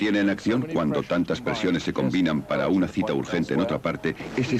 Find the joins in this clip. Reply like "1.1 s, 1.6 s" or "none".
3.0 s